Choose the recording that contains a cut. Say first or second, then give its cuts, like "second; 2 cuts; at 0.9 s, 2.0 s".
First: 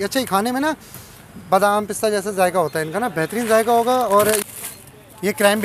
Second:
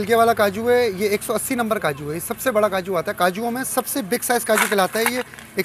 first; 1 cut; at 4.4 s